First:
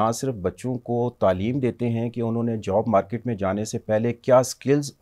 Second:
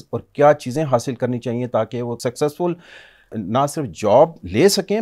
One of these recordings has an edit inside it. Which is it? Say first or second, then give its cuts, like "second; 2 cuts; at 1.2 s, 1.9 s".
second; 2 cuts; at 2.2 s, 3.3 s